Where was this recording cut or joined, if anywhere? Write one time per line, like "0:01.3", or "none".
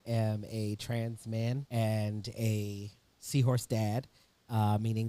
0:01.6